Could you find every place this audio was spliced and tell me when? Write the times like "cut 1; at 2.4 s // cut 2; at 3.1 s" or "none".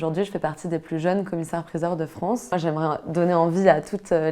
cut 1; at 2.5 s